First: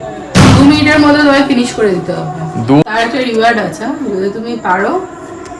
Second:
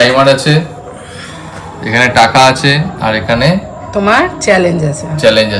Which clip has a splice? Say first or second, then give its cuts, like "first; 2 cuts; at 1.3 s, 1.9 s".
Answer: first; 1 cut; at 2.8 s